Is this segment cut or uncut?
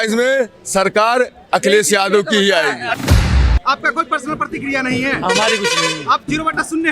cut